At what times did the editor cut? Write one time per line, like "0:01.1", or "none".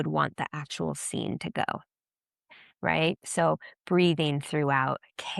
none